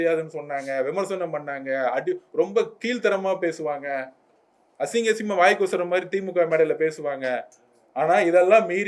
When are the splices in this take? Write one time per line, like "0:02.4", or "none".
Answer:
none